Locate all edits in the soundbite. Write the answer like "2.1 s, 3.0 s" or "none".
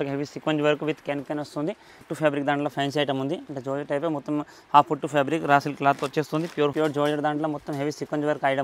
2.1 s, 6.7 s